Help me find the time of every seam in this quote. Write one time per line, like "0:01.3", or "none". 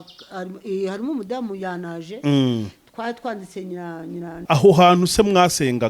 0:04.4